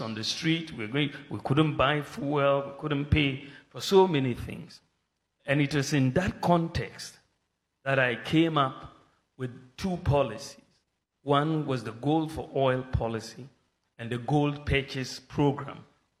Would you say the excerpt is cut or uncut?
uncut